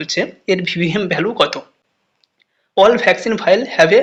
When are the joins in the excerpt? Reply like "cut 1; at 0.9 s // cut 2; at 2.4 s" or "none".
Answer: none